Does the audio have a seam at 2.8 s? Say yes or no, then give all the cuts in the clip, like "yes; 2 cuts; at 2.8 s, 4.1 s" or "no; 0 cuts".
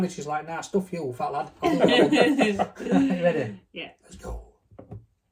no; 0 cuts